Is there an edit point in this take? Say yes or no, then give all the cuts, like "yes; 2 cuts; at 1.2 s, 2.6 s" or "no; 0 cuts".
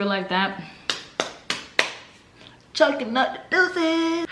no; 0 cuts